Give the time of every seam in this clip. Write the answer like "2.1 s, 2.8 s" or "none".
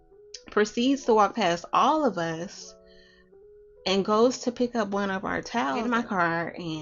5.8 s